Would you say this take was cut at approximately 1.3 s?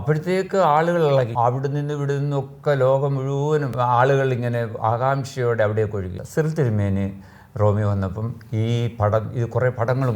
yes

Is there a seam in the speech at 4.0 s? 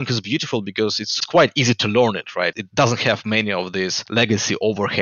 yes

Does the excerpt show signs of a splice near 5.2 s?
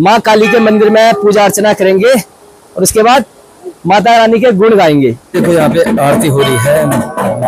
yes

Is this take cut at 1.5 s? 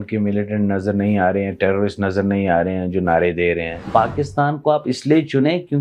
no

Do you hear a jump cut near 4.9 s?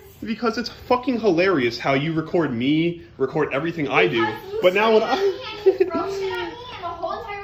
no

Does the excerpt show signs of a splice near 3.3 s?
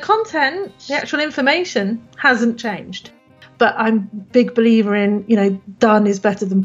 yes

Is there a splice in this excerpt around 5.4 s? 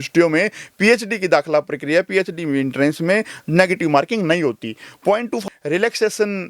yes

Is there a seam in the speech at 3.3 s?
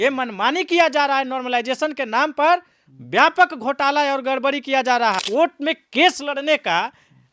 no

